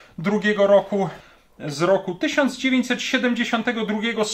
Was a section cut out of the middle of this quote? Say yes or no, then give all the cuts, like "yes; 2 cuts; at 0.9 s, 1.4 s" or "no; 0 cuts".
yes; 1 cut; at 1.2 s